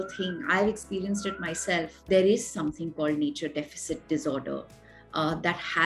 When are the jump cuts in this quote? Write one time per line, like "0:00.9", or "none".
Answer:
0:02.0